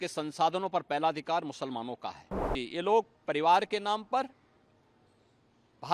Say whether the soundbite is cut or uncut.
cut